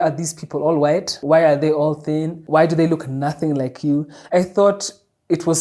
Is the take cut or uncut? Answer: cut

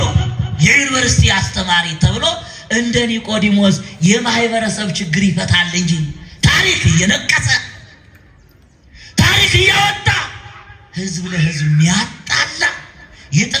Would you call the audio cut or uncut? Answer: uncut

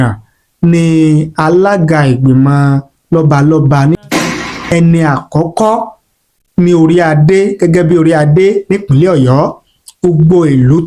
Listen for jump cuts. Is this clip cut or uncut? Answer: cut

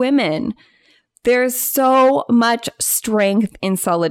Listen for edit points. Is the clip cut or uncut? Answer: uncut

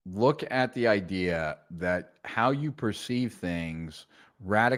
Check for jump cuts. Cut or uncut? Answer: uncut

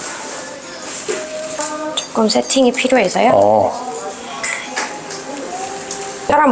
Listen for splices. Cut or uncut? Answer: uncut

